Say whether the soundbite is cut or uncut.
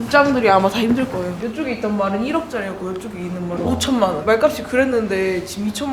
cut